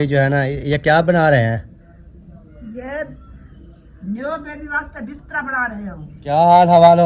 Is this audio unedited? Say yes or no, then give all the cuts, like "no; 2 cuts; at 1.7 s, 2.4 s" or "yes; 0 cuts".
no; 1 cut; at 6.1 s